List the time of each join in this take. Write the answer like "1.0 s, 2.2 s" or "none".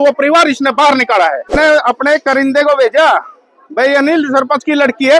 1.6 s